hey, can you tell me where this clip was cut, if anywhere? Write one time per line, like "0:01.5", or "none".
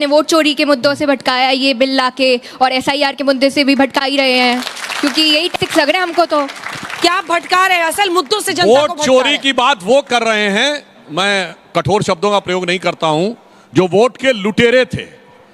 none